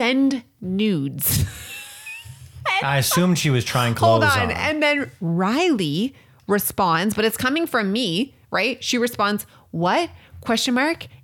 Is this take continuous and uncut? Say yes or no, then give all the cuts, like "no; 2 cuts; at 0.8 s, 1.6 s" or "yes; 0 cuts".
yes; 0 cuts